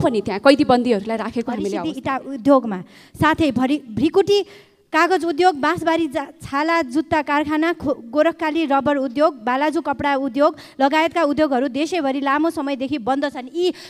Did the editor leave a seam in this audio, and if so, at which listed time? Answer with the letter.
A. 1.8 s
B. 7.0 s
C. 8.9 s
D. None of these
A